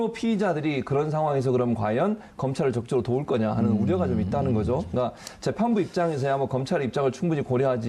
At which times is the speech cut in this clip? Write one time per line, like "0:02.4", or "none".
0:03.0